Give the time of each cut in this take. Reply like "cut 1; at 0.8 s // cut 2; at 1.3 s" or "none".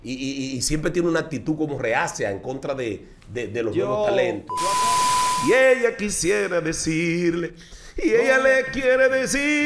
cut 1; at 4.9 s